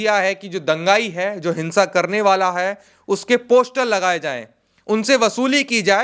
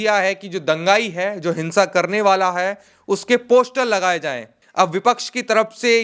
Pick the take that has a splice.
second; 1 cut; at 4.6 s

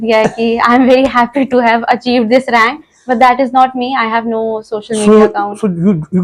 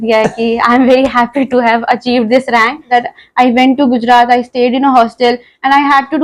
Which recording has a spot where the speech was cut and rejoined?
second; 1 cut; at 2.9 s

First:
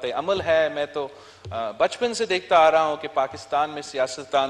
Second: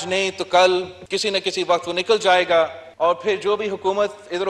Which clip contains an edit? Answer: second; 2 cuts; at 1.0 s, 2.8 s

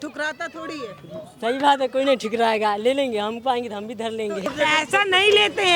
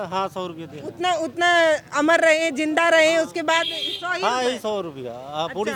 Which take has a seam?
first; 1 cut; at 4.5 s

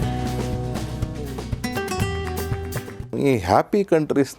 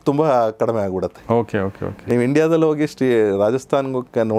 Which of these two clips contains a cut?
first; 1 cut; at 3.2 s

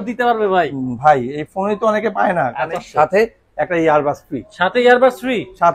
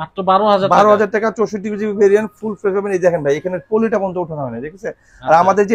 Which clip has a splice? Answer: first; 1 cut; at 2.7 s

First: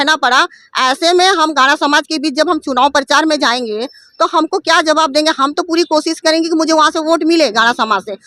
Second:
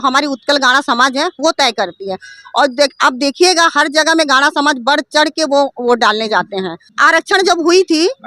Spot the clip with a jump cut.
second; 1 cut; at 6.9 s

